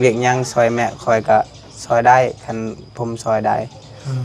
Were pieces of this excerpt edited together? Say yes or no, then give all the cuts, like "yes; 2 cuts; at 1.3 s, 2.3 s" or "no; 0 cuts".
no; 0 cuts